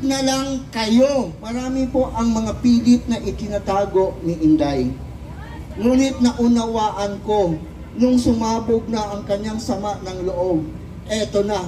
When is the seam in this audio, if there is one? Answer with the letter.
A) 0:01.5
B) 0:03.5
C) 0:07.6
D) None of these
A